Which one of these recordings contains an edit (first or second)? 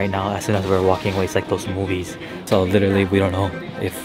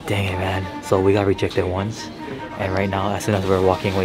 first